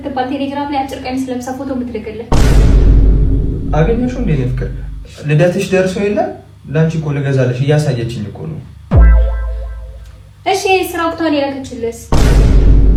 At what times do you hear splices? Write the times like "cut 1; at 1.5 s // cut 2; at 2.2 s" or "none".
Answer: none